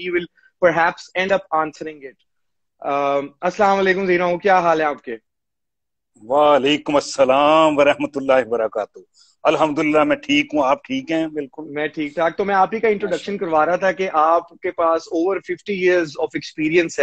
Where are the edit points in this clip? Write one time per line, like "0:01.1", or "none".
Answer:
0:13.6